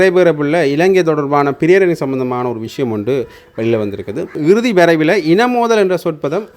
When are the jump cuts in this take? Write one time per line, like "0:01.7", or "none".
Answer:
0:04.4